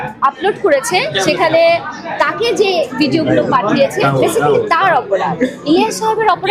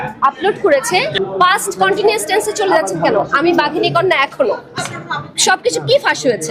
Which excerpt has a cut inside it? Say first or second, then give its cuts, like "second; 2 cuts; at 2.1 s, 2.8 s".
second; 2 cuts; at 1.2 s, 4.9 s